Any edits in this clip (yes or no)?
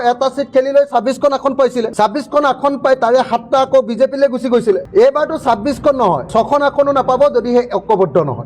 no